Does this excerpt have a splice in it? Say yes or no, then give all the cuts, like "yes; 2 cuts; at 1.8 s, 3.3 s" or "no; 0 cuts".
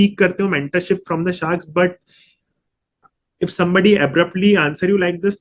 no; 0 cuts